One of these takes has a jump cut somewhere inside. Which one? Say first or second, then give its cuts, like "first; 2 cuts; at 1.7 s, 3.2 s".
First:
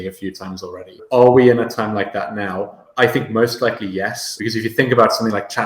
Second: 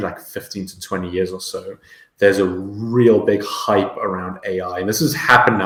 first; 3 cuts; at 0.9 s, 2.8 s, 4.3 s